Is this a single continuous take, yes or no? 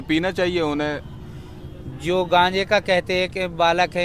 yes